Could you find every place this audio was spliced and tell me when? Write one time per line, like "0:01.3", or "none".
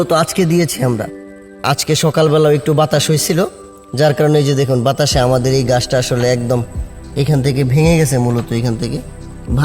0:01.7